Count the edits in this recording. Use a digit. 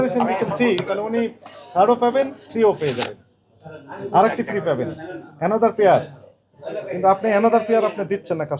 0